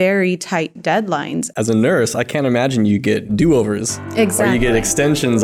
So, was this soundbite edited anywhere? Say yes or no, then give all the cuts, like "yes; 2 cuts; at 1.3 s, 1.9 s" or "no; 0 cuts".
yes; 2 cuts; at 1.4 s, 3.3 s